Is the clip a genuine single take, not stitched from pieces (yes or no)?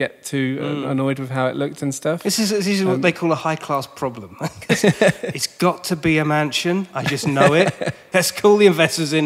no